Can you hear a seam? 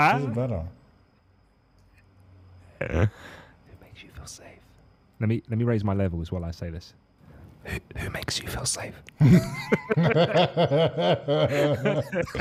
no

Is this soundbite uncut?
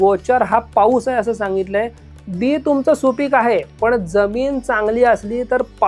yes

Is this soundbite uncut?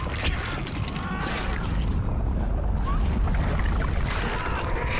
yes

